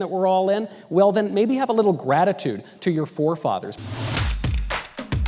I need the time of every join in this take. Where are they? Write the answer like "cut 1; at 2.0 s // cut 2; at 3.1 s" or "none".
cut 1; at 3.8 s